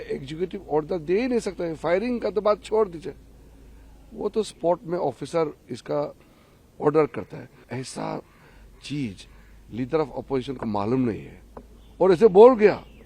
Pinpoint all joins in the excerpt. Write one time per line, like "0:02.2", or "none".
0:07.6